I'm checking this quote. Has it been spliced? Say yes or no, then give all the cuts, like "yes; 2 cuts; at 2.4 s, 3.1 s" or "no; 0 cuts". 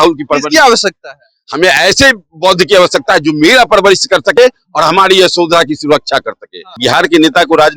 yes; 1 cut; at 6.6 s